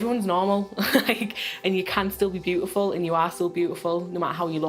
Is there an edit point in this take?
no; 0 cuts

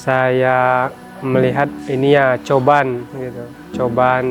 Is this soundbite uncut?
no; 2 cuts; at 1.1 s, 1.8 s

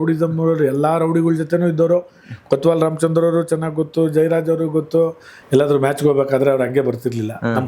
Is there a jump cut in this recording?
yes; 1 cut; at 5.3 s

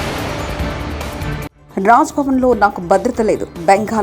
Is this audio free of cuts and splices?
no; 1 cut; at 1.5 s

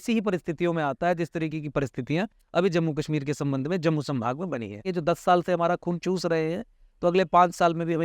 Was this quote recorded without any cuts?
no; 2 cuts; at 4.9 s, 6.0 s

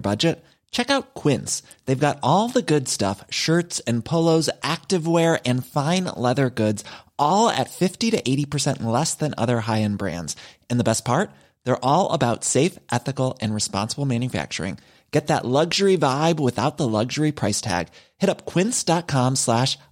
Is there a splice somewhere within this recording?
no; 0 cuts

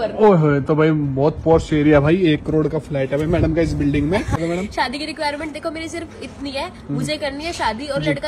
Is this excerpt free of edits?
no; 1 cut; at 4.4 s

